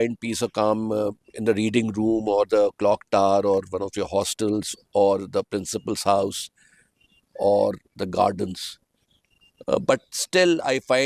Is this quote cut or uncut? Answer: uncut